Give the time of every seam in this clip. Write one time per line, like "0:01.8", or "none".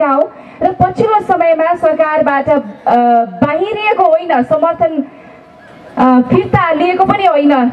none